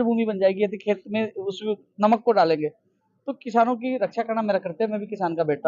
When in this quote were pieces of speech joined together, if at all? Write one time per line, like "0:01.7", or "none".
none